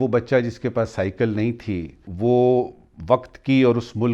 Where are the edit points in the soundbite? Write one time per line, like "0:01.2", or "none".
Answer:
0:02.0